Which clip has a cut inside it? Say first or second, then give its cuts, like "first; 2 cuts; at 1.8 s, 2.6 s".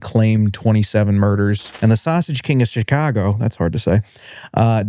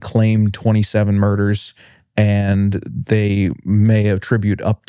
first; 1 cut; at 1.7 s